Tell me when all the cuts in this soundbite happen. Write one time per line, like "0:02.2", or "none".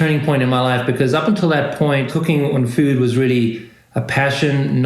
0:02.1